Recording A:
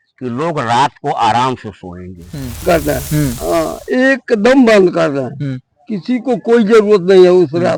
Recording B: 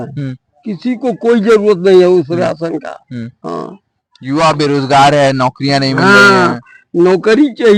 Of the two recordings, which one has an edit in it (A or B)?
A